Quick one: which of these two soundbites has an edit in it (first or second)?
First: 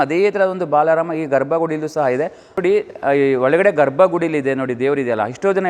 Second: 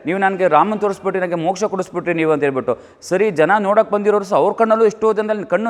first